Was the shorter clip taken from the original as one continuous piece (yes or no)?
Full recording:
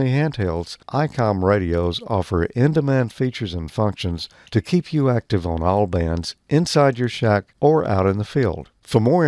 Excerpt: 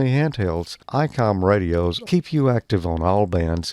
no